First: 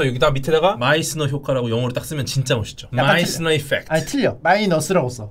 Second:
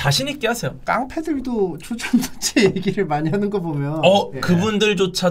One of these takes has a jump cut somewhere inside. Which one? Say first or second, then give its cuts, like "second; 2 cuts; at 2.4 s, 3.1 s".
second; 2 cuts; at 0.8 s, 4.3 s